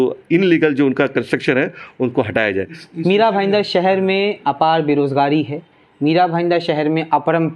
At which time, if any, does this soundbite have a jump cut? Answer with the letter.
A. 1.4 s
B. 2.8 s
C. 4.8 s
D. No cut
B